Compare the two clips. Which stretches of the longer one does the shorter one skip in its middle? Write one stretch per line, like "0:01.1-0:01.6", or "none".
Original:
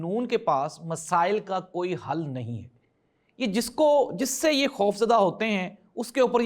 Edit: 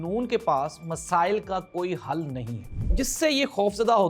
0:02.9-0:04.1